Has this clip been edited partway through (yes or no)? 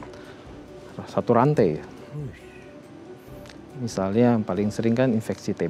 no